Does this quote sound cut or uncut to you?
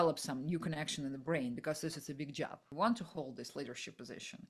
cut